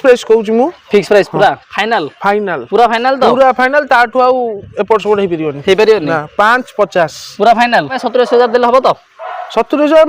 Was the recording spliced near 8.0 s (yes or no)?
yes